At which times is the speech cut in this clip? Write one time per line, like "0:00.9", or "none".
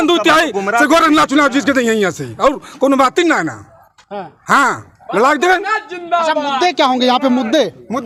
none